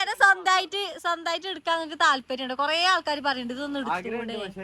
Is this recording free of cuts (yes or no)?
yes